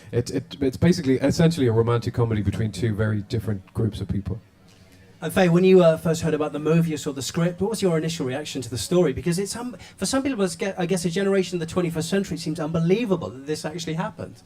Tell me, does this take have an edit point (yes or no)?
yes